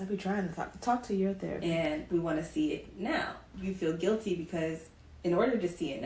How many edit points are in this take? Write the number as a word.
two